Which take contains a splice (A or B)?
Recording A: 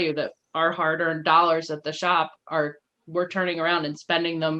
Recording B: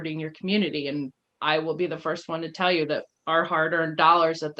B